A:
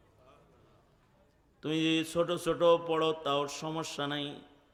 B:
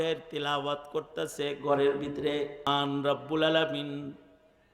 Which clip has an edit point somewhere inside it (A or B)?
B